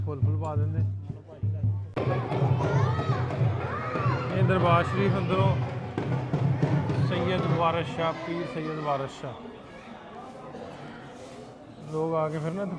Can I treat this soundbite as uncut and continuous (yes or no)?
no